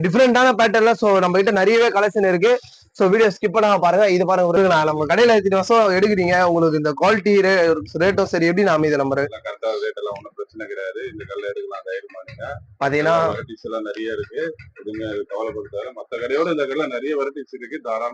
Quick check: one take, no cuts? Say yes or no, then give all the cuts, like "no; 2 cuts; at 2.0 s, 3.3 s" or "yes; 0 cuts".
no; 1 cut; at 4.7 s